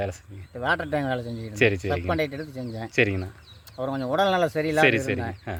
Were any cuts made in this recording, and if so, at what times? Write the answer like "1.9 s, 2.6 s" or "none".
none

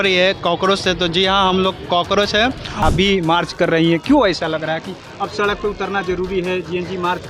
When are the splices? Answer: 2.8 s

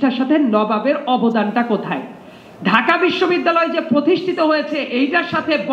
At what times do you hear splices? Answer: none

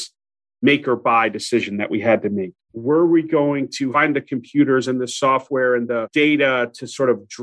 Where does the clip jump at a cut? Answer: 2.6 s, 3.9 s

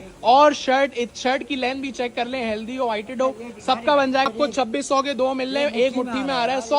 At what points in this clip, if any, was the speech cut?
4.3 s

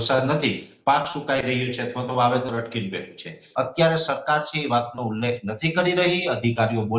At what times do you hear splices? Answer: 3.4 s

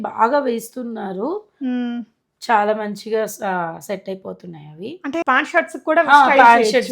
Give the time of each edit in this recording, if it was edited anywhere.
5.2 s

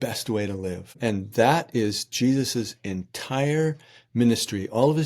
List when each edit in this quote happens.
1.0 s

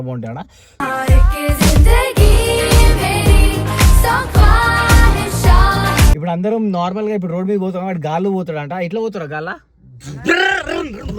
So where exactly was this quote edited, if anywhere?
6.1 s

